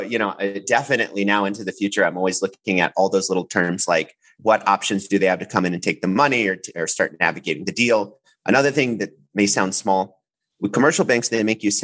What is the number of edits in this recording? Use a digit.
0